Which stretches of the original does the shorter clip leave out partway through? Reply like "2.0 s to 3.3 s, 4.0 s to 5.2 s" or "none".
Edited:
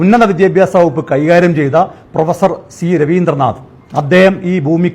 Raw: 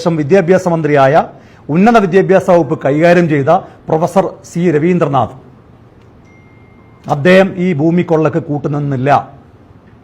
5.5 s to 6.9 s